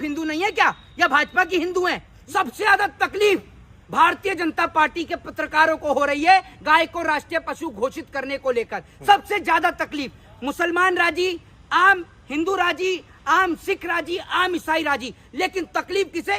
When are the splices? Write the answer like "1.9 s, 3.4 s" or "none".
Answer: 2.1 s